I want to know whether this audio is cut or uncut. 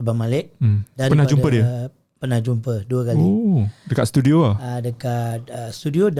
uncut